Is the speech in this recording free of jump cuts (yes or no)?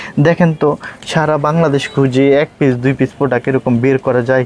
yes